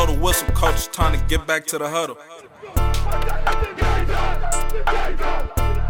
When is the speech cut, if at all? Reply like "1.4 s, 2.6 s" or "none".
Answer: none